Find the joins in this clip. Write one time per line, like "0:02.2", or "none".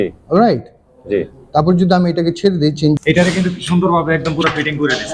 0:03.0